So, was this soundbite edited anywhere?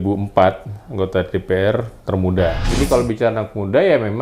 yes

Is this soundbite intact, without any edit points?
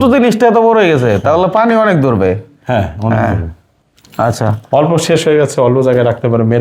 yes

